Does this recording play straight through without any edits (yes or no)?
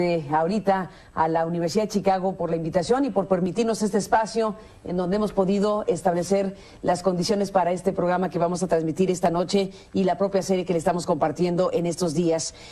no